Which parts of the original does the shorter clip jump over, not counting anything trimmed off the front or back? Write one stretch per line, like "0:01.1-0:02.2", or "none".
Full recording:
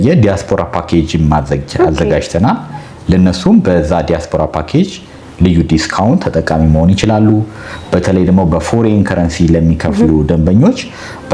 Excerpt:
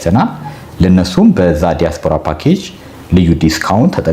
none